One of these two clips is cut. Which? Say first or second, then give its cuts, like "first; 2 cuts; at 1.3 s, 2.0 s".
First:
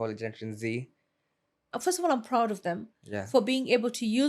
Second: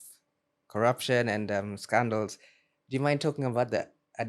first; 1 cut; at 1.5 s